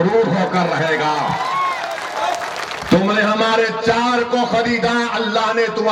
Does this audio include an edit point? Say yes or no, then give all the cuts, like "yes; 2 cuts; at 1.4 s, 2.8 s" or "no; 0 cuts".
no; 0 cuts